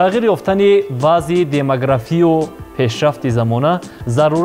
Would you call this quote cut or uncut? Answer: uncut